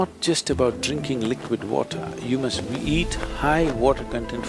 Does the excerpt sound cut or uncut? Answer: uncut